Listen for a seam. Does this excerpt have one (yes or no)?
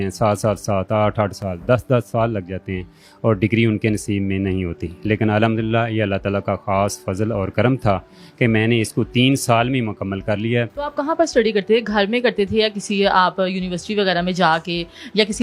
no